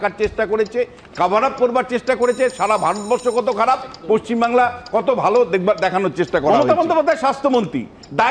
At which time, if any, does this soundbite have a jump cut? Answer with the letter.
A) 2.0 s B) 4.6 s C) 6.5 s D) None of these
C